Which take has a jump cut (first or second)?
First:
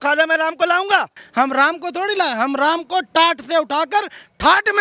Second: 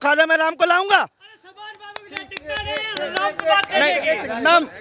first